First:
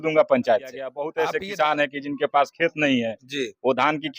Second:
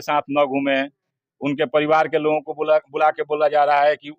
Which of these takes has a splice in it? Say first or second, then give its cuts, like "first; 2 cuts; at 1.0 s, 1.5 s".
first; 1 cut; at 1.0 s